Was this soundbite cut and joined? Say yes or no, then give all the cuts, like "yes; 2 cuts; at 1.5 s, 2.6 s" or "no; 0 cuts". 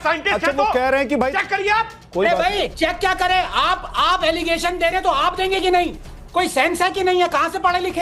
no; 0 cuts